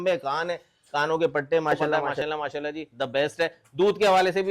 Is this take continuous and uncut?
no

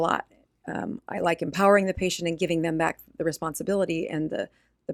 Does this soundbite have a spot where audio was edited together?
no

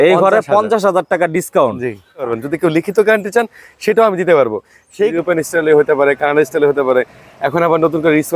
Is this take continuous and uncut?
no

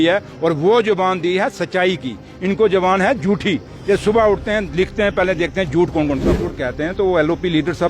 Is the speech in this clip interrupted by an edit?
yes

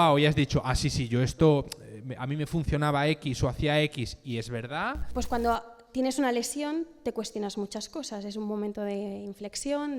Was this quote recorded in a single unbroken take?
no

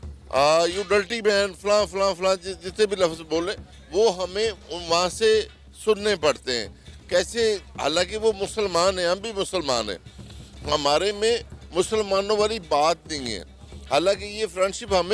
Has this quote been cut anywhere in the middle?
no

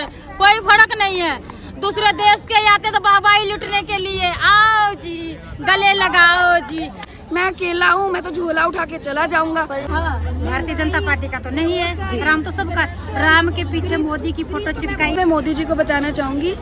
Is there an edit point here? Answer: yes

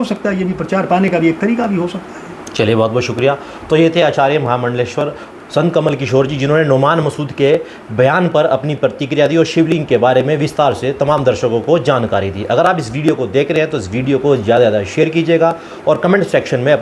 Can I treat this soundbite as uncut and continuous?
yes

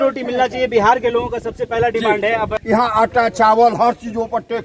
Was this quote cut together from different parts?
yes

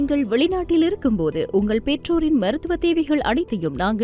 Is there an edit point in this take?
no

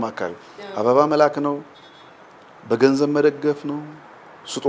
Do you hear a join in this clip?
no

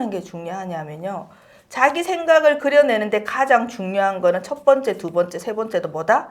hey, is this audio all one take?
yes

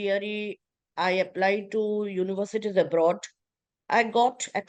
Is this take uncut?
yes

